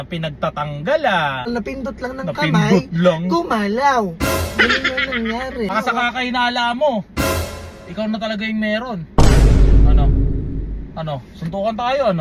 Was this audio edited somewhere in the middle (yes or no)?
yes